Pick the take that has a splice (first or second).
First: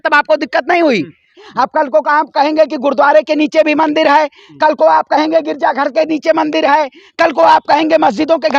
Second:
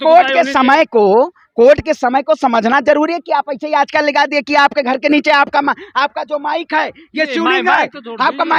first